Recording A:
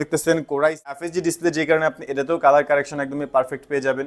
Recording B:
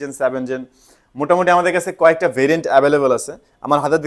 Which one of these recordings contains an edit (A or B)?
A